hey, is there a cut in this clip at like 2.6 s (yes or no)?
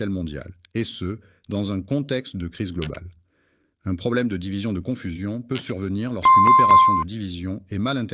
no